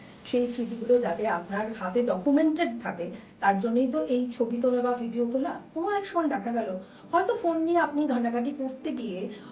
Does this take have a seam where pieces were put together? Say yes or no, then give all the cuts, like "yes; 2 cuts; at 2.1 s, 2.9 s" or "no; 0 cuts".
yes; 1 cut; at 5.7 s